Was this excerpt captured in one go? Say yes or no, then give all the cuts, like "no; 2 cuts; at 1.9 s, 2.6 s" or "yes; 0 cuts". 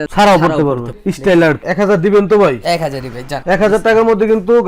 no; 1 cut; at 1.6 s